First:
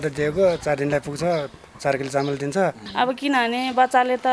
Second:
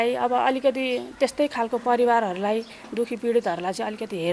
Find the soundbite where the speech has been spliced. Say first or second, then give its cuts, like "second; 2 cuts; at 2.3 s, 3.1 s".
first; 1 cut; at 2.8 s